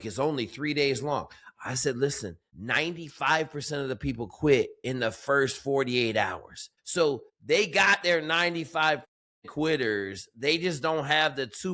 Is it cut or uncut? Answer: uncut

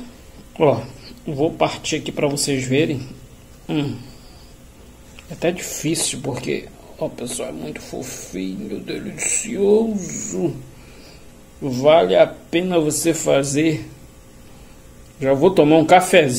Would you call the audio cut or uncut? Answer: uncut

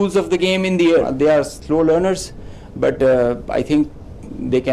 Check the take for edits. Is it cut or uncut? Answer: cut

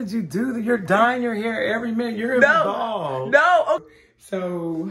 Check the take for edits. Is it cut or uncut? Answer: cut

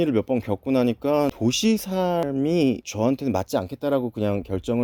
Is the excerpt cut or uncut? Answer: uncut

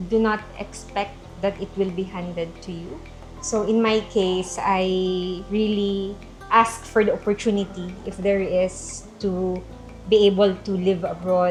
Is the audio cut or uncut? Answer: uncut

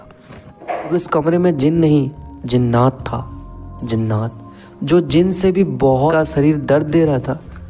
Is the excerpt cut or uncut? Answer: cut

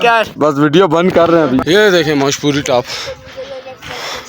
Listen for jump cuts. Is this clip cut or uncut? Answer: cut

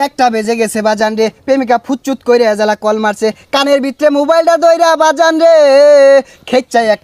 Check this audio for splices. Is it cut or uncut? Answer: uncut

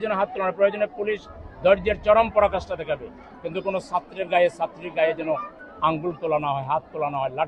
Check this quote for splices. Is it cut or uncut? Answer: uncut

